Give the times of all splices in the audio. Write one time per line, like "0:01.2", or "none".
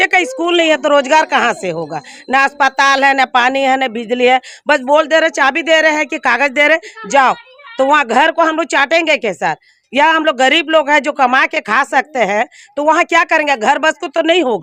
none